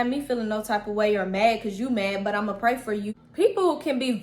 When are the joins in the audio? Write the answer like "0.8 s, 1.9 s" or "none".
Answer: 3.2 s